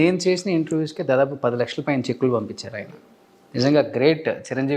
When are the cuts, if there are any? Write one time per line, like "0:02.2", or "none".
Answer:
none